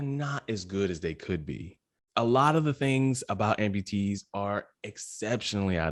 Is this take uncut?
yes; 0 cuts

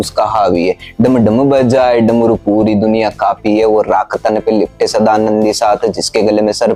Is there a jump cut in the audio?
no; 0 cuts

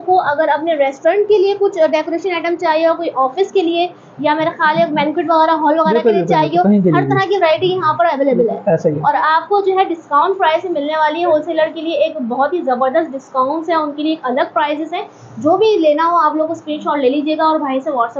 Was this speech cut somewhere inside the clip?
no; 0 cuts

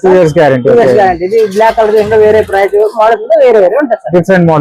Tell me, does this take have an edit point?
no; 0 cuts

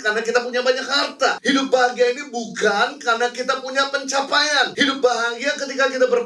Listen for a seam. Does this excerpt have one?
yes; 2 cuts; at 1.4 s, 4.7 s

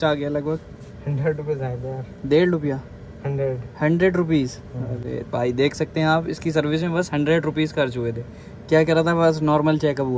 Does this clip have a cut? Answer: no; 0 cuts

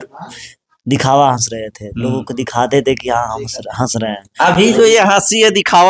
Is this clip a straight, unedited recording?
yes; 0 cuts

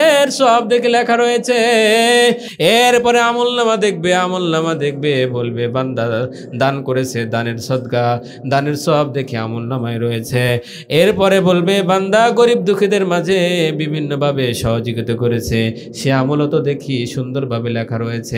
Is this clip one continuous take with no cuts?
yes; 0 cuts

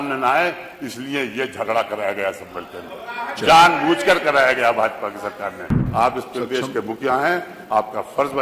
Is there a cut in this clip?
yes; 1 cut; at 5.8 s

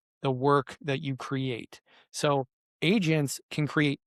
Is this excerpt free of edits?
yes; 0 cuts

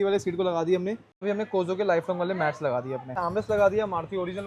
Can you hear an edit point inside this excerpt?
yes; 2 cuts; at 1.2 s, 3.2 s

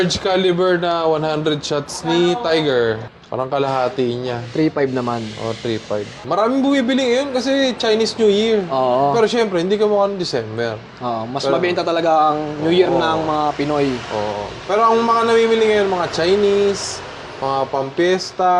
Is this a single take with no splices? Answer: no; 2 cuts; at 3.2 s, 6.2 s

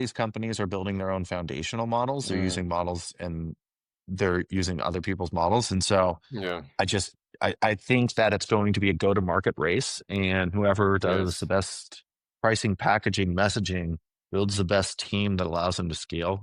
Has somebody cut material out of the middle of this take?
no; 0 cuts

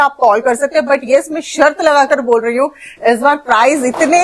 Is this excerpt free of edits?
yes; 0 cuts

